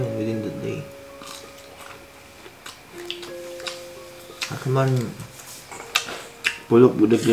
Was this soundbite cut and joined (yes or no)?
no